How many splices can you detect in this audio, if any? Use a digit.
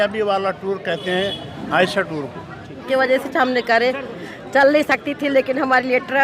1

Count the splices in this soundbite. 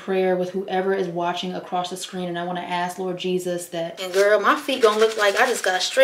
1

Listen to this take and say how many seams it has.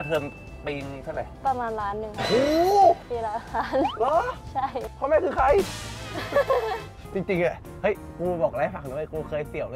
3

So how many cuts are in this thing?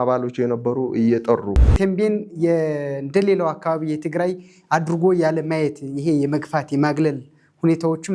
1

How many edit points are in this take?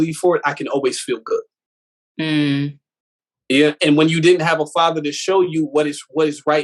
0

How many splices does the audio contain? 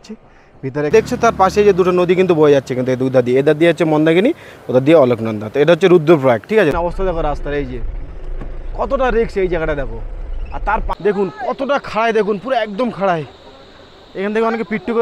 3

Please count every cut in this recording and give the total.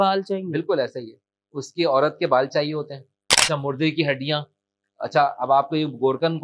1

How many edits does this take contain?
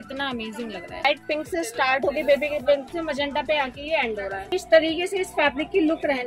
2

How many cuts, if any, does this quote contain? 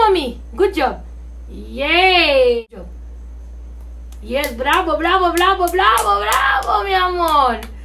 1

